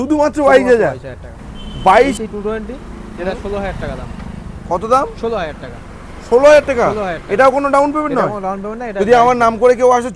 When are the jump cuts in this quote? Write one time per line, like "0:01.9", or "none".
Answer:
0:02.1
0:08.9